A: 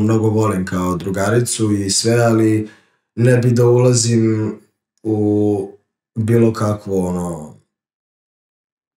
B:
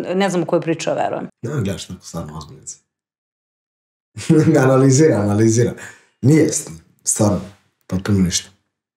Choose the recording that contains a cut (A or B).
B